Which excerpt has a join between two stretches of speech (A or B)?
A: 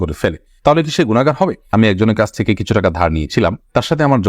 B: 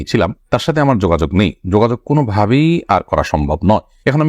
A